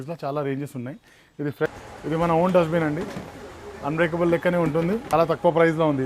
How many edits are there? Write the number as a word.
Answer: two